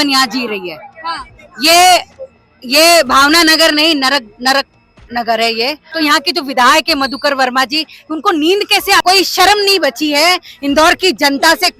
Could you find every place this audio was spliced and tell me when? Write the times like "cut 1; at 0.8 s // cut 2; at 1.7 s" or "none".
cut 1; at 5.8 s // cut 2; at 9.0 s